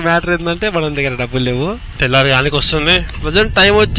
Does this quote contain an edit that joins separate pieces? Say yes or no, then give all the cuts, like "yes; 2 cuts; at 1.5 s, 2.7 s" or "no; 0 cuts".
yes; 1 cut; at 1.9 s